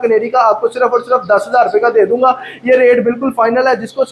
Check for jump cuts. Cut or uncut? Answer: uncut